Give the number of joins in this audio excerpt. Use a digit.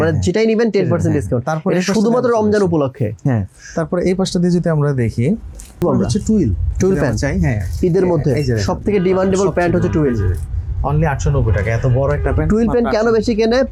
0